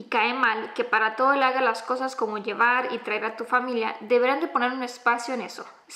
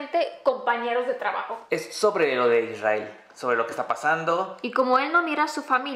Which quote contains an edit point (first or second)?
second